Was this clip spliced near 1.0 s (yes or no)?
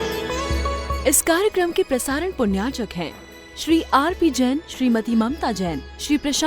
yes